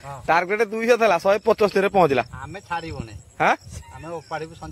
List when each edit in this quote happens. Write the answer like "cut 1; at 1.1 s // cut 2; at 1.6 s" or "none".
none